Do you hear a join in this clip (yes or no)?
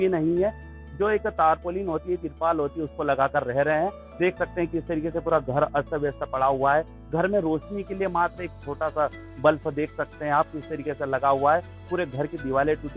no